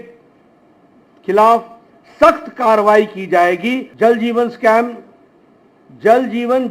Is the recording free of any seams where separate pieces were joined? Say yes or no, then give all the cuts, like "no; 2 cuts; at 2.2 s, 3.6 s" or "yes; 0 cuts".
no; 1 cut; at 3.9 s